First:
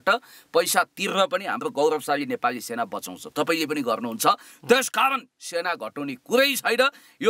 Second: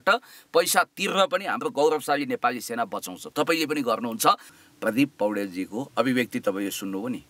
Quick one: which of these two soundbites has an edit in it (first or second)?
second